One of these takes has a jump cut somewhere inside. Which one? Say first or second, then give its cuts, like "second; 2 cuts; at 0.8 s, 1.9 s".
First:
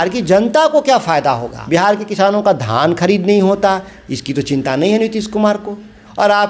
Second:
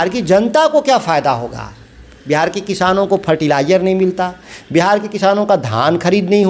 first; 1 cut; at 1.5 s